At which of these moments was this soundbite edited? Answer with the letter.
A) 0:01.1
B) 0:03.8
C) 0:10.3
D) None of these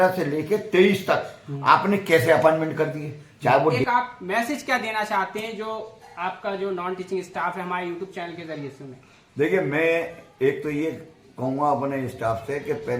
B